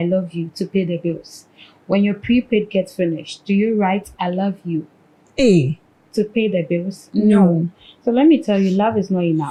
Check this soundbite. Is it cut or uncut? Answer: uncut